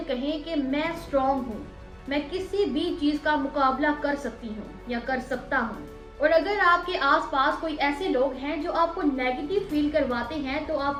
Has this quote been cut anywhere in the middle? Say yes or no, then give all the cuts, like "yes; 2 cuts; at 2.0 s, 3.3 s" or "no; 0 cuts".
no; 0 cuts